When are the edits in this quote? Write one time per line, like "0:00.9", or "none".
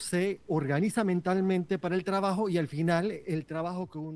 none